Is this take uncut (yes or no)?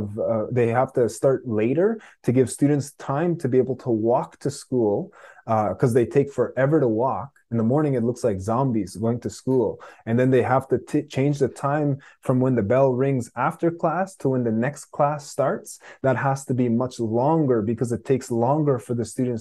yes